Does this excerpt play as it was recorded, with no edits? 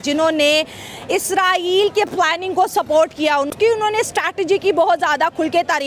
no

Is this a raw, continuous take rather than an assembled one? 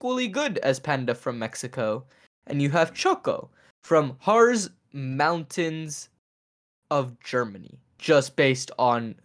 no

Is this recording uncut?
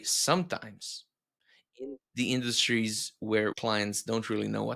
no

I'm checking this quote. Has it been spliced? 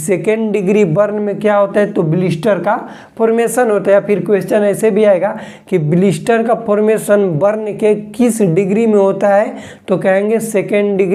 no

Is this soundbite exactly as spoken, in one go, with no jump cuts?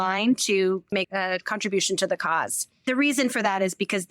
no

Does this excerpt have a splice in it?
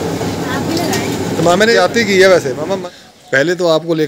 yes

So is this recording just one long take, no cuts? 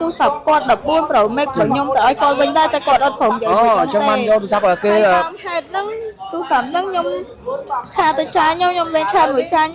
yes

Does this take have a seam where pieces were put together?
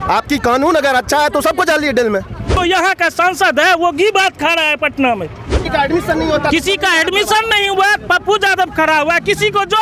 yes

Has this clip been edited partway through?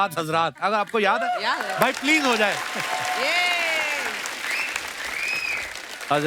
no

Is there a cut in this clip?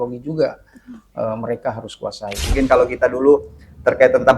yes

